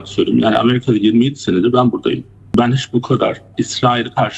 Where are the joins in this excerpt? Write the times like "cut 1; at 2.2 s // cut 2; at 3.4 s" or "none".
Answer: cut 1; at 2.5 s // cut 2; at 3.5 s